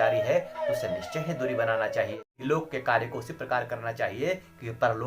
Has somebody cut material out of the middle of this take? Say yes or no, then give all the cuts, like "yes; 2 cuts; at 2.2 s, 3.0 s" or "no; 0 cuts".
yes; 1 cut; at 2.2 s